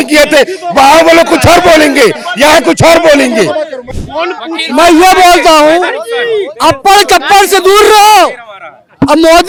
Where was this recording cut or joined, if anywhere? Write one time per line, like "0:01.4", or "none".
none

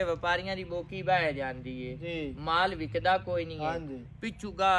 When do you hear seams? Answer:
none

